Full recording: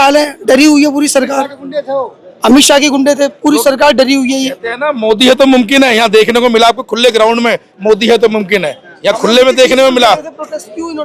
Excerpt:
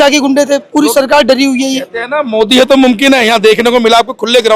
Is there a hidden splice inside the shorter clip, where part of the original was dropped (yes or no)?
no